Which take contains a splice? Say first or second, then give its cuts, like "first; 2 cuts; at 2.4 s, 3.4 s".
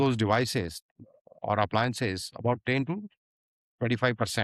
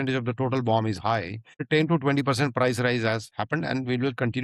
second; 1 cut; at 1.6 s